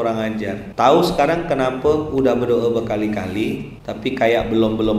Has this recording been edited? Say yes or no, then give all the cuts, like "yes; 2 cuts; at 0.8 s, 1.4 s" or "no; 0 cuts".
no; 0 cuts